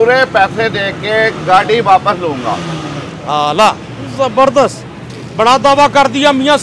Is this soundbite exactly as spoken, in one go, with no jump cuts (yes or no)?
yes